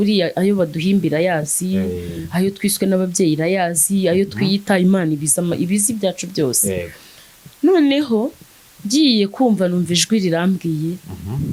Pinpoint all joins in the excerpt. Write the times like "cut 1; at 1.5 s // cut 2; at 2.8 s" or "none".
none